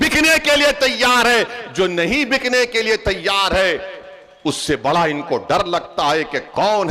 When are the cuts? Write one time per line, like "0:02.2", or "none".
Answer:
none